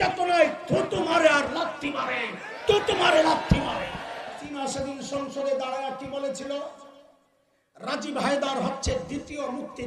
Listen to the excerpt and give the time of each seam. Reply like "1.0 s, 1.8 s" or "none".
4.4 s